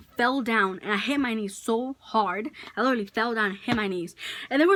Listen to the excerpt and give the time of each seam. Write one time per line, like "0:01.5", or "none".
none